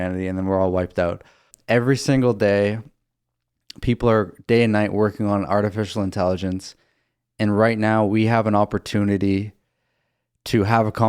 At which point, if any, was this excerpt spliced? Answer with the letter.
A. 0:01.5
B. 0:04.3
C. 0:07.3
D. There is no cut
A